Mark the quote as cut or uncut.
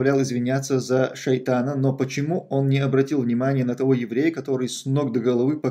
uncut